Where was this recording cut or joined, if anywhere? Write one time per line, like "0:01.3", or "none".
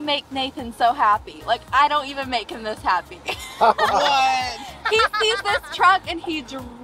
none